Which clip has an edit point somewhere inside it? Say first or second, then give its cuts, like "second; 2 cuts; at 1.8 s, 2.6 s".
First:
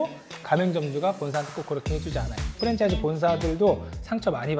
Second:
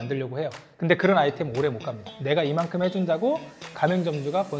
second; 1 cut; at 2.1 s